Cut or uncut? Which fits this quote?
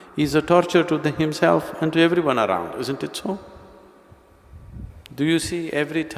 cut